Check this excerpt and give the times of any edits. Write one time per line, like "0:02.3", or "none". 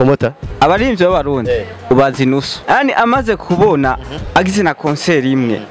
0:02.5